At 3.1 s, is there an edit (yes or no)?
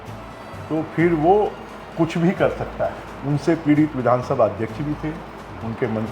yes